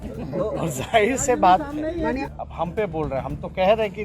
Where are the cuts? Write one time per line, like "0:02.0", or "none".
0:02.3